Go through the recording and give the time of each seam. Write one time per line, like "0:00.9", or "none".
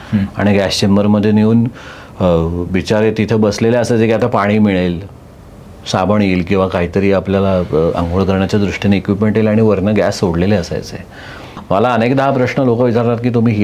0:11.6